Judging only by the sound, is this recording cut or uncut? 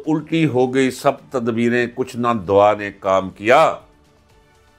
uncut